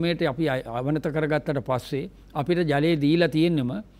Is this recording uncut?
yes; 0 cuts

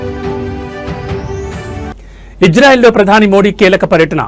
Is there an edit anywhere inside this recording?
no; 0 cuts

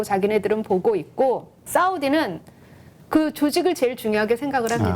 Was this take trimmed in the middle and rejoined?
yes; 1 cut; at 1.6 s

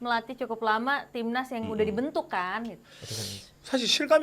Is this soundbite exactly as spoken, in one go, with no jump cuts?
no; 1 cut; at 2.9 s

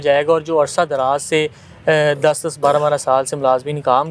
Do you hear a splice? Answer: no; 0 cuts

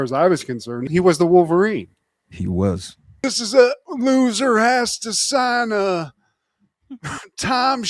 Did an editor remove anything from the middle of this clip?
yes; 1 cut; at 3.2 s

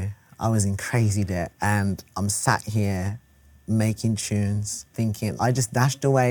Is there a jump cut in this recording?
yes; 2 cuts; at 1.5 s, 5.3 s

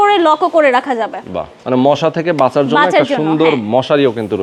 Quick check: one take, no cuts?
yes; 0 cuts

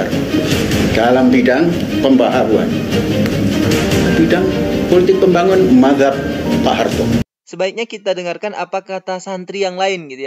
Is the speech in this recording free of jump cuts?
no; 1 cut; at 7.2 s

